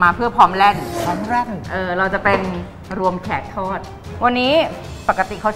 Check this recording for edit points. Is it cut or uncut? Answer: cut